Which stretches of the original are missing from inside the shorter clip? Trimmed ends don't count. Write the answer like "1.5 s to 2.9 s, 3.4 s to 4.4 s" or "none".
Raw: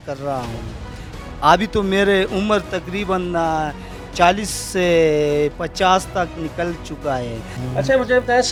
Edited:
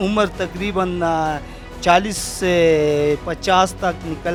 none